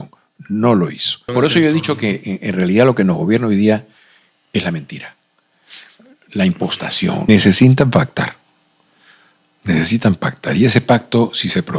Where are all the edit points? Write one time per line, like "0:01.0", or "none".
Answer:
0:01.3
0:07.3